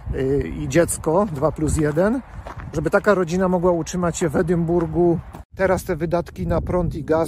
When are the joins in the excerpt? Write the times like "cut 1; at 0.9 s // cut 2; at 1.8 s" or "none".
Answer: cut 1; at 5.5 s

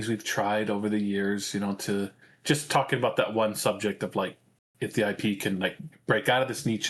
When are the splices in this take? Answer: none

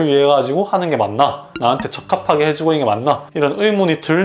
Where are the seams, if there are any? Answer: cut 1; at 1.5 s

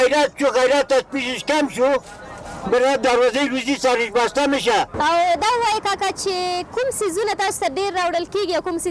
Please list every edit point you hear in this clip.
cut 1; at 4.9 s

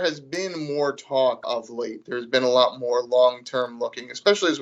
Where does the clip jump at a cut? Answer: cut 1; at 1.5 s

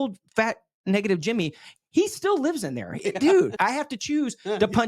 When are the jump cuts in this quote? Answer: cut 1; at 3.5 s

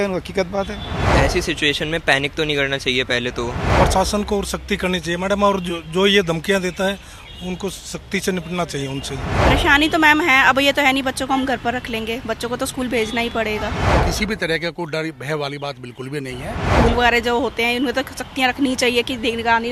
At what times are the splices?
cut 1; at 1.1 s // cut 2; at 3.8 s // cut 3; at 9.4 s // cut 4; at 13.9 s // cut 5; at 16.7 s

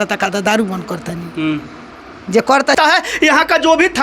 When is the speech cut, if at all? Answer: cut 1; at 2.9 s

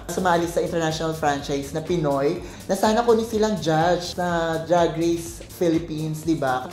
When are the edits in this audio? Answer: none

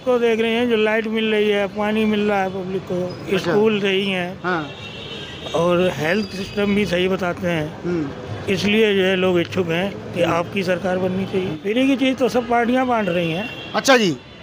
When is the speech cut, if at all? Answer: cut 1; at 11.6 s

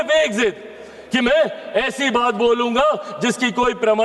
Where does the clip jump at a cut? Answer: none

